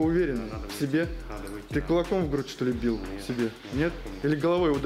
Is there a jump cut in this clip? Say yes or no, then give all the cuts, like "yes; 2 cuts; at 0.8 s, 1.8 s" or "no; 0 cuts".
no; 0 cuts